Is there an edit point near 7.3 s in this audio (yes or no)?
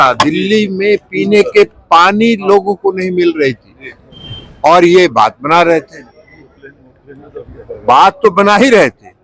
no